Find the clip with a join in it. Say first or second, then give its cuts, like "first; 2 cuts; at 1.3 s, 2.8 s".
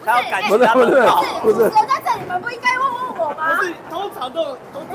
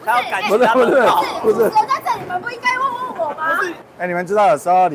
second; 1 cut; at 3.8 s